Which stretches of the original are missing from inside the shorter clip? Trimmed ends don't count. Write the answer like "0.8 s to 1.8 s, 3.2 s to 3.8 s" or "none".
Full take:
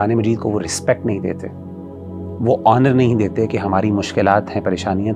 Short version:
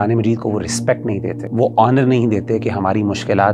1.4 s to 2.3 s